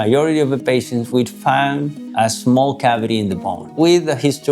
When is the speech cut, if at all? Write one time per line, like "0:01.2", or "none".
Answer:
0:02.0